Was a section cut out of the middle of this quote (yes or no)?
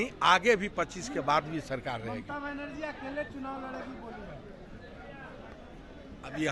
no